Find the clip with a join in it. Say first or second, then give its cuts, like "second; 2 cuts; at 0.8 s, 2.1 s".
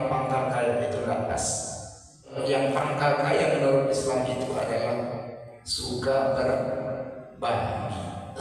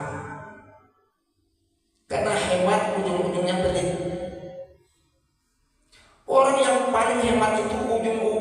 first; 1 cut; at 2.4 s